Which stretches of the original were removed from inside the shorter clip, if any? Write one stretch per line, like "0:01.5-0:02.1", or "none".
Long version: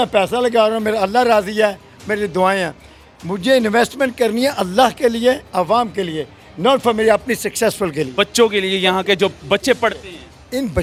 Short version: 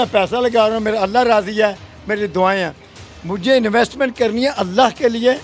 none